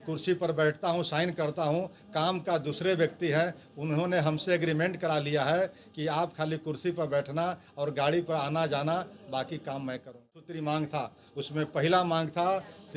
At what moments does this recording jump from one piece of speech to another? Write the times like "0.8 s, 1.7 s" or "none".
10.4 s